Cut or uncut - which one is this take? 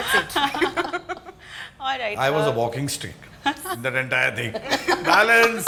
uncut